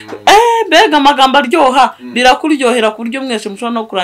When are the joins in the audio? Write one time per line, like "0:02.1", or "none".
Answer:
none